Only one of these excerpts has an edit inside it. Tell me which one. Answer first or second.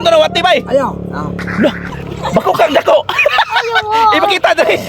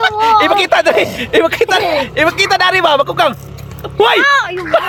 first